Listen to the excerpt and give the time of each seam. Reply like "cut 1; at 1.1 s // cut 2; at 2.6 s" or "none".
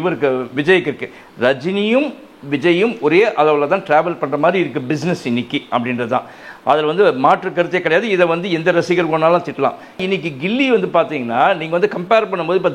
cut 1; at 10.0 s